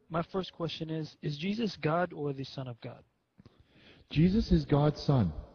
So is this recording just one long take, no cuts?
no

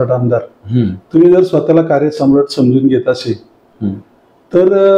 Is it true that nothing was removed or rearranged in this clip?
yes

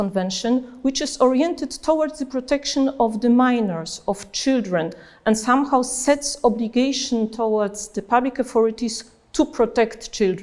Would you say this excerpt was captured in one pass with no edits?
yes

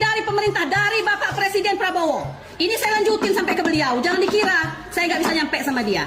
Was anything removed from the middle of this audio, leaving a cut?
no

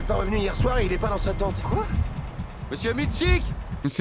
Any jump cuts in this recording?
no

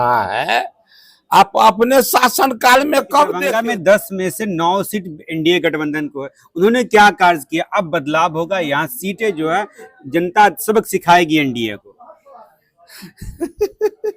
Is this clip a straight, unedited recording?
no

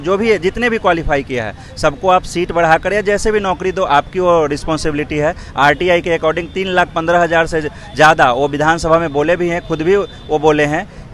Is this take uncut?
yes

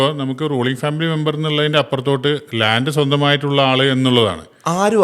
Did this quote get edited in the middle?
no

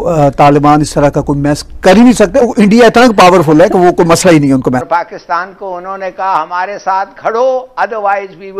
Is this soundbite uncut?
no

